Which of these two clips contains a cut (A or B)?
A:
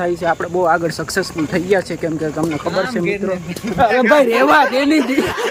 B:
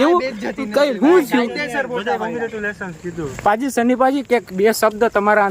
B